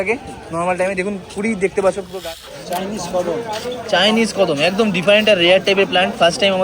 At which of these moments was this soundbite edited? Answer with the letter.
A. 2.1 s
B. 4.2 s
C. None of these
A